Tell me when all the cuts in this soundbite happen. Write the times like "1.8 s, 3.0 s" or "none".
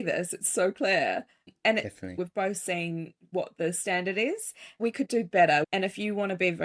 2.2 s, 4.7 s, 5.7 s